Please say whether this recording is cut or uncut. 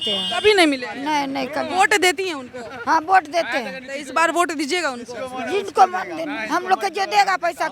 uncut